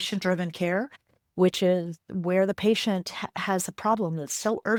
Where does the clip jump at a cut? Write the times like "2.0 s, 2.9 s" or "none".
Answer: none